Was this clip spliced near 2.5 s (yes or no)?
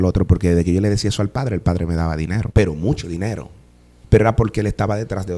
yes